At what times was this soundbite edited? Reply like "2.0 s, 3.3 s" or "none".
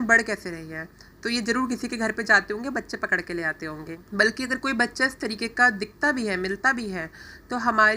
3.9 s